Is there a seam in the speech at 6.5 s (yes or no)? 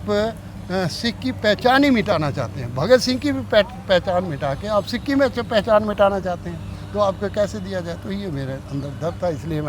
no